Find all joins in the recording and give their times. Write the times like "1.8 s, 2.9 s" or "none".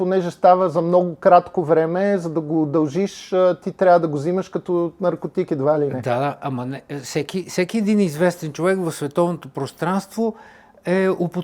none